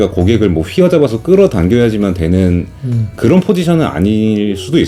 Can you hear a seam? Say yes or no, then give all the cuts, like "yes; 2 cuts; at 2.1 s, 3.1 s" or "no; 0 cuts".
no; 0 cuts